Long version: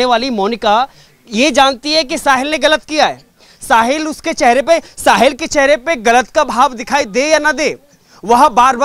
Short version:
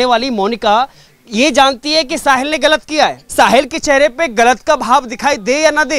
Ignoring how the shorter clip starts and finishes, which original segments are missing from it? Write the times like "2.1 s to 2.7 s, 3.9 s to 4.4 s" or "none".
3.2 s to 4.9 s